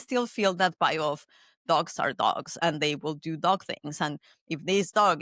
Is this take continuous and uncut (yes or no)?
yes